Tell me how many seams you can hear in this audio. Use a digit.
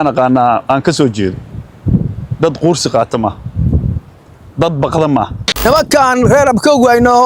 1